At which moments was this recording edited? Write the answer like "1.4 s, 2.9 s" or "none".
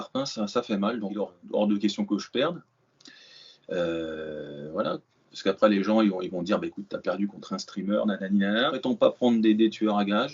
1.4 s, 8.8 s